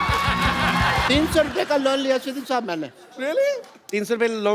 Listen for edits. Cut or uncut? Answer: cut